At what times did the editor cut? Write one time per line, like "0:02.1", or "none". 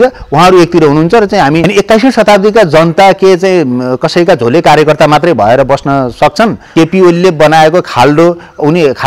0:01.7
0:06.7